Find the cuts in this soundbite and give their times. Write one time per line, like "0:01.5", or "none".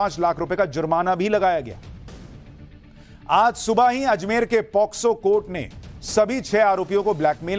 none

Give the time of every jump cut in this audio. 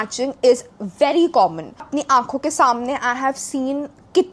0:01.9

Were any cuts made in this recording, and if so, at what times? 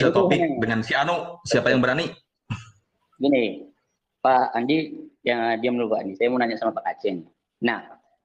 none

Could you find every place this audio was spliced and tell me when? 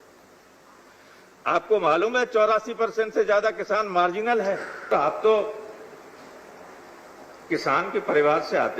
0:04.9

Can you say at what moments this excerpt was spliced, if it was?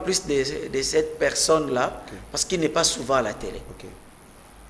none

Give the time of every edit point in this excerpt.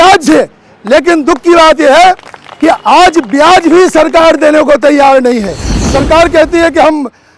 0:05.9

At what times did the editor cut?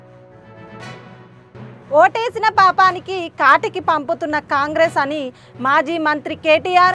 0:01.2

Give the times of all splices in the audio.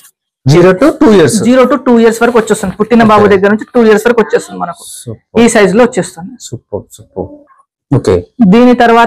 none

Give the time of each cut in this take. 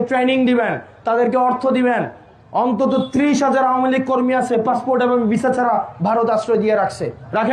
none

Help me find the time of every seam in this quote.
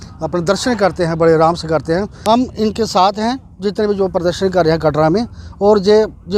0:02.1

